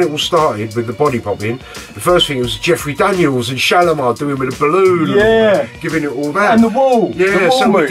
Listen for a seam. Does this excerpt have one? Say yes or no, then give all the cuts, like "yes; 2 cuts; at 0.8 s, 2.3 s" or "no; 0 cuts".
no; 0 cuts